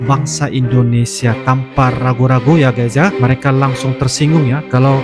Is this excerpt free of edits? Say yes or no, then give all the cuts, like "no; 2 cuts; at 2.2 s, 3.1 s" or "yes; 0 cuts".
no; 1 cut; at 3.1 s